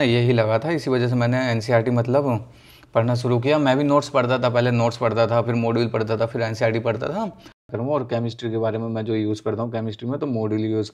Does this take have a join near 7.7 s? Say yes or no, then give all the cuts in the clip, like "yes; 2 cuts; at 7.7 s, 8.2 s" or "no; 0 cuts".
yes; 1 cut; at 7.7 s